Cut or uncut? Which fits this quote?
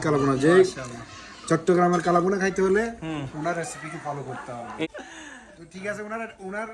uncut